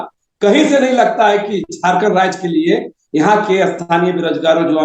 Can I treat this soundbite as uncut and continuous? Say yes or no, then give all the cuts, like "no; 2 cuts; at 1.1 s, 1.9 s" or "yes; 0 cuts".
yes; 0 cuts